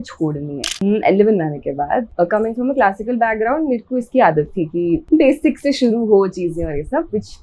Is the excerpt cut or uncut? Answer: cut